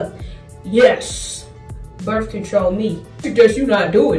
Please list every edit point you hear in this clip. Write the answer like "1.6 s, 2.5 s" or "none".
3.2 s